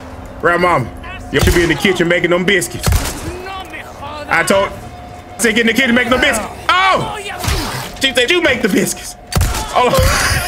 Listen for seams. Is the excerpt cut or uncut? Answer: cut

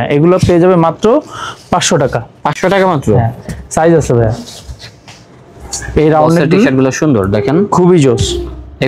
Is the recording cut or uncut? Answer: uncut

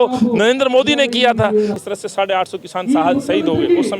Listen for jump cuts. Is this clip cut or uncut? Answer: cut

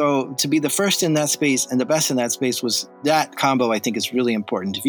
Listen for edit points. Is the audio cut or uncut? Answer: cut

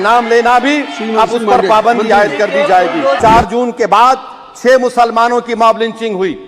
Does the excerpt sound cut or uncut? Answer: cut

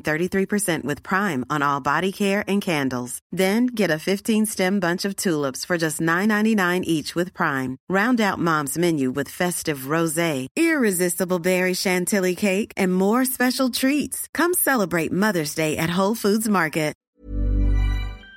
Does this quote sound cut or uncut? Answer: cut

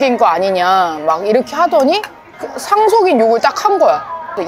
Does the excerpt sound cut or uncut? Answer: uncut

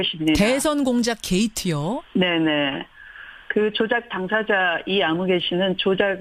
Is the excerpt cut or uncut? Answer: uncut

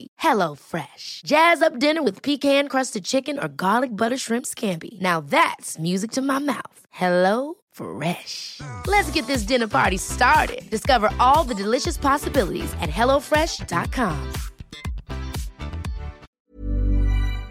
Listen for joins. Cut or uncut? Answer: cut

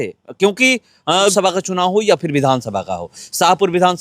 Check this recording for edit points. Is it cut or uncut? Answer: cut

